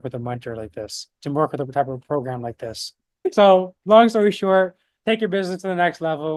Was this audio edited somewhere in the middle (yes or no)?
no